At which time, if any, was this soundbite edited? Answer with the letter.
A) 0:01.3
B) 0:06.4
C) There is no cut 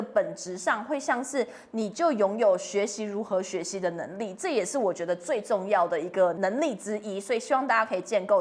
B